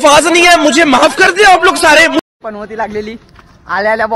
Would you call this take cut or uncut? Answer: cut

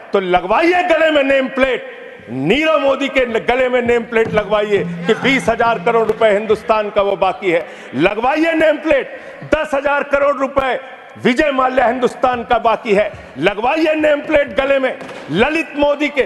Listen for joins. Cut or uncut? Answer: uncut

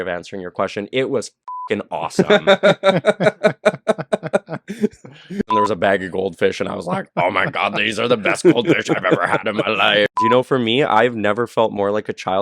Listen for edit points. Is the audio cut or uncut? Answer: cut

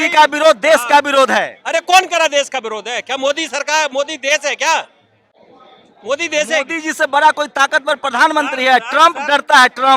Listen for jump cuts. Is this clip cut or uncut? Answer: uncut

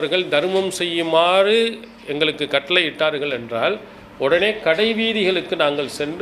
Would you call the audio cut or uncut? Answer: uncut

